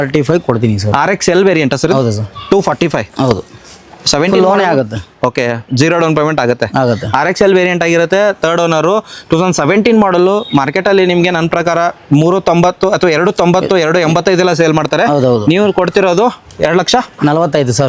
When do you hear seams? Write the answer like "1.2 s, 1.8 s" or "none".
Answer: none